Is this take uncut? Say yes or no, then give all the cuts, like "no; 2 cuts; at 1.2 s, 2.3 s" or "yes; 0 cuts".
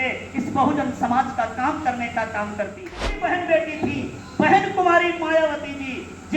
no; 1 cut; at 3.3 s